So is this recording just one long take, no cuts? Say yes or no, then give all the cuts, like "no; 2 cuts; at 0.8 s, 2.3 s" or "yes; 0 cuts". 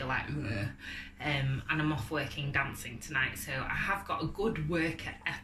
yes; 0 cuts